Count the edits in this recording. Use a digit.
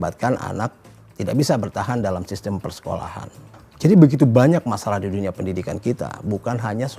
1